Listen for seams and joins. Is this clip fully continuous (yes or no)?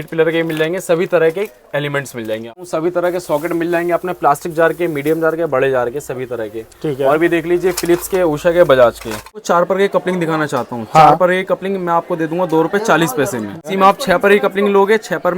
no